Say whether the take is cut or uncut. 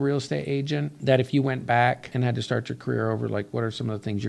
cut